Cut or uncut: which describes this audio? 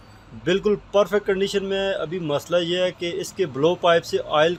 uncut